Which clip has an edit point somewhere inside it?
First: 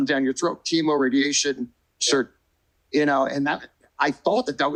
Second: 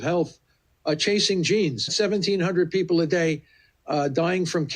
second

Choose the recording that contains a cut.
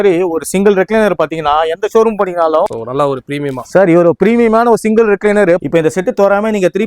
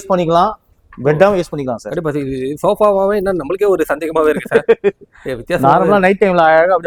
first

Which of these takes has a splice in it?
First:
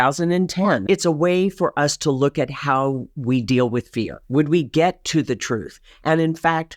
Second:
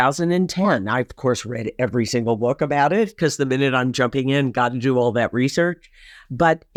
first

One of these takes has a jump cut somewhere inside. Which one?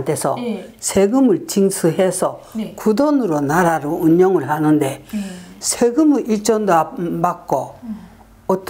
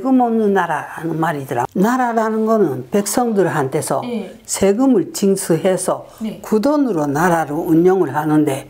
second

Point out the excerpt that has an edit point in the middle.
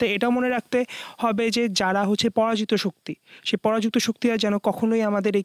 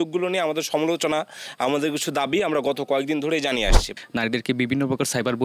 second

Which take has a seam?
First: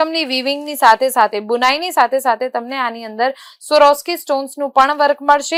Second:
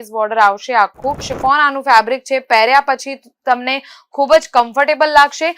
second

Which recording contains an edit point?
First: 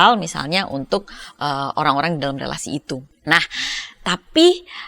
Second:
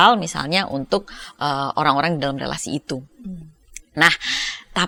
first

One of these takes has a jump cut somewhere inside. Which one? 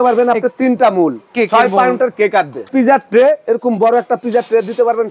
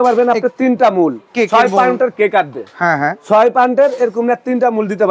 first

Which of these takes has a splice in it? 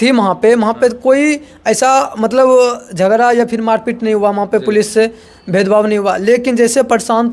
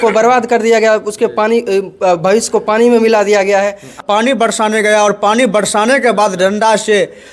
second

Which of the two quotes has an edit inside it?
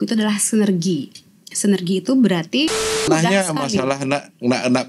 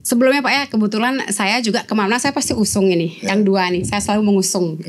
first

